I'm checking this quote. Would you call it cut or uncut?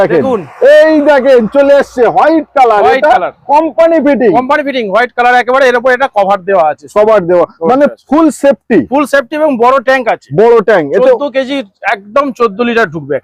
uncut